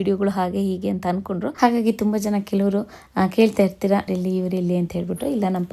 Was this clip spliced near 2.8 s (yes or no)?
no